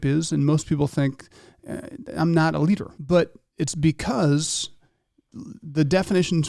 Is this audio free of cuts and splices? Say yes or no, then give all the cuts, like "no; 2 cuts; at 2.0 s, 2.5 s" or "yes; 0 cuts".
no; 1 cut; at 2.9 s